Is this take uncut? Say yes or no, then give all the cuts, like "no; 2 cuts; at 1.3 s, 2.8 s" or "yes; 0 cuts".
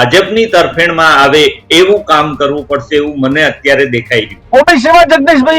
no; 1 cut; at 4.4 s